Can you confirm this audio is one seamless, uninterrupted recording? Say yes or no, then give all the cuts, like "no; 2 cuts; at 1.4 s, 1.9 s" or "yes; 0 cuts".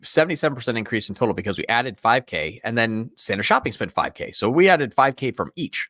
yes; 0 cuts